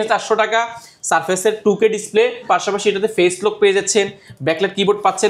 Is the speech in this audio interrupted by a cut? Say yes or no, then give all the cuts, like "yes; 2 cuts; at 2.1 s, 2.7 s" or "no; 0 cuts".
no; 0 cuts